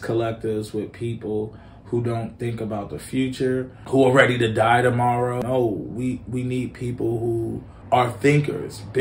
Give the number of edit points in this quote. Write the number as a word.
three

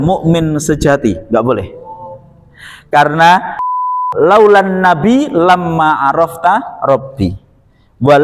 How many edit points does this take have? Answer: one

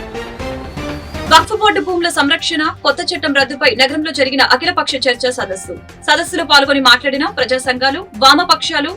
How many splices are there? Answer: one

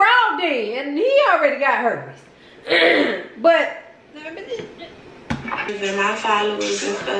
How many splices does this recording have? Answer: one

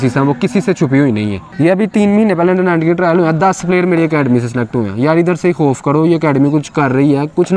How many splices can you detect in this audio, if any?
one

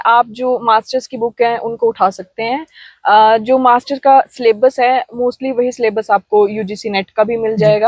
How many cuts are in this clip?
zero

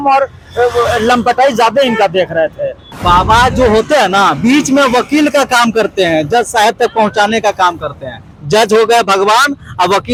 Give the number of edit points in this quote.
zero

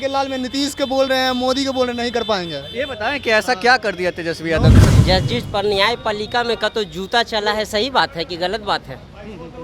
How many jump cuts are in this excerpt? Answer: one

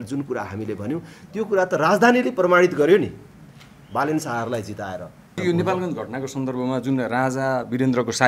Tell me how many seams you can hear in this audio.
one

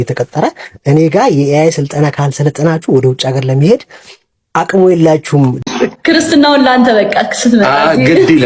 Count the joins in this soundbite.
one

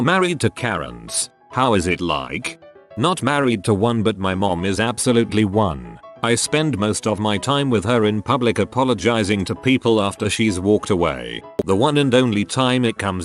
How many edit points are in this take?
one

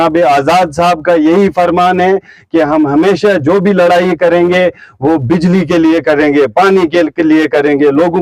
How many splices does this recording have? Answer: zero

